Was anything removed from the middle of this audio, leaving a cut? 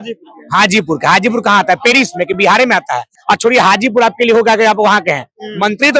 yes; 1 cut; at 3.1 s

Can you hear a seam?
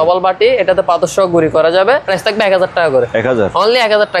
yes; 1 cut; at 2.1 s

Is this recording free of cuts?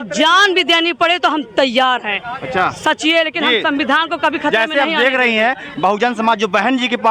yes; 0 cuts

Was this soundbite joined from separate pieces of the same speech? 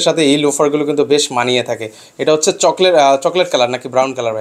no; 0 cuts

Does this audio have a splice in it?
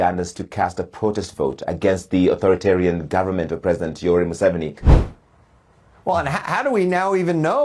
yes; 1 cut; at 4.9 s

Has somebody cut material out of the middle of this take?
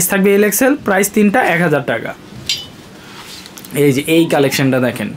no; 0 cuts

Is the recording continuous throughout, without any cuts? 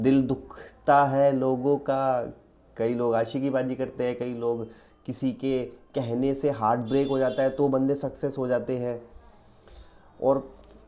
yes; 0 cuts

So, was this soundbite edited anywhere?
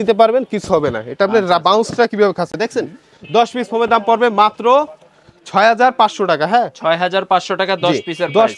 no; 0 cuts

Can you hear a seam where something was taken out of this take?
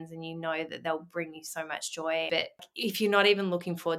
yes; 1 cut; at 2.7 s

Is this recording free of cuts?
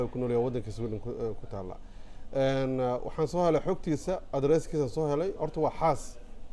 yes; 0 cuts

